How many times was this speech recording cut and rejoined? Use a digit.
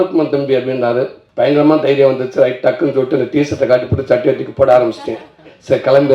1